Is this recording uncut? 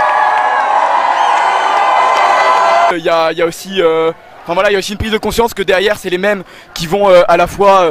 no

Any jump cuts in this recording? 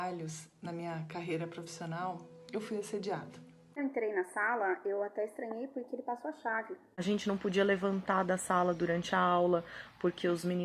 yes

